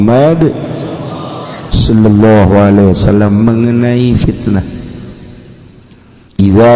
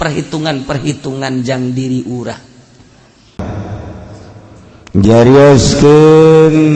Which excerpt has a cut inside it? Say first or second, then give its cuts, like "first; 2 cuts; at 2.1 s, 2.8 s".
second; 1 cut; at 3.4 s